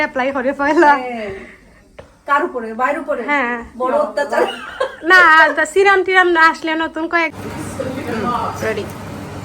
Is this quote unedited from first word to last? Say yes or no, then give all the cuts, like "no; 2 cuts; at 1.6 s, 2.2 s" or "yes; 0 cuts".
no; 1 cut; at 7.8 s